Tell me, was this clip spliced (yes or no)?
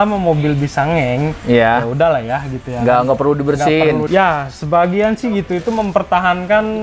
yes